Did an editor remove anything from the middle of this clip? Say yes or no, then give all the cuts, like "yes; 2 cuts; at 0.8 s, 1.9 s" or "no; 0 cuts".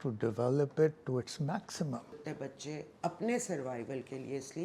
yes; 1 cut; at 2.3 s